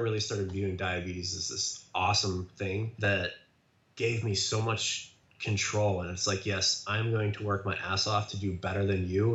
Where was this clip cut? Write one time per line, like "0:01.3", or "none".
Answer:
0:02.9